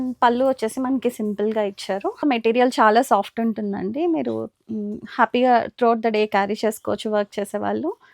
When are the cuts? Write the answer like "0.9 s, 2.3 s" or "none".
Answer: 2.2 s